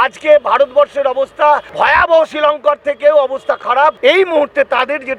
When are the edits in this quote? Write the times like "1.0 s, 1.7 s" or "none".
1.7 s, 4.0 s

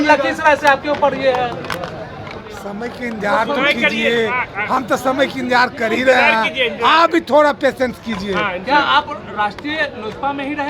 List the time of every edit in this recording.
none

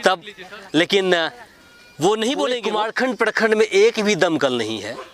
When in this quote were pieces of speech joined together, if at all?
2.7 s

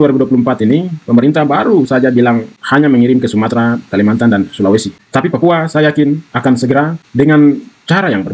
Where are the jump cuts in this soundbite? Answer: none

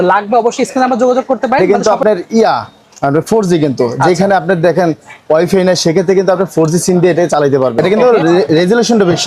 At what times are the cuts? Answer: 1.6 s, 7.8 s

